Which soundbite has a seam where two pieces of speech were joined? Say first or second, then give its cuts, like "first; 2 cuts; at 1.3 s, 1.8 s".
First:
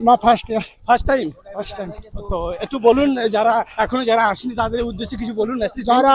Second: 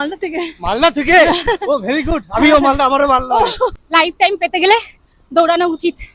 second; 1 cut; at 3.8 s